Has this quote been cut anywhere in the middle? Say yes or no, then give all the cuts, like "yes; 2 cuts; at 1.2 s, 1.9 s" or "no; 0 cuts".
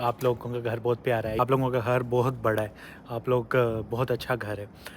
yes; 1 cut; at 1.4 s